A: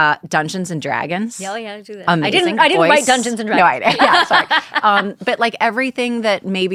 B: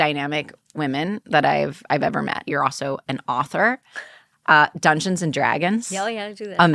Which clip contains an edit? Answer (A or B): B